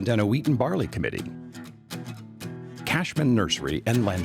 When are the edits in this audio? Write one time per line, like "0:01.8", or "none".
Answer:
0:01.2
0:02.9